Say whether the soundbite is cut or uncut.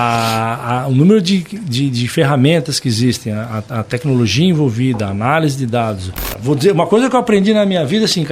cut